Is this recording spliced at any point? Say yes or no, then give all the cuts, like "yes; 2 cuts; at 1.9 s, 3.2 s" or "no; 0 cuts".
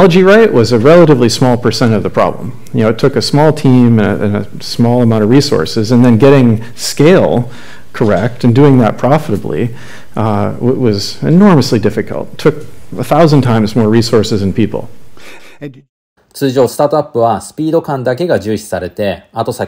no; 0 cuts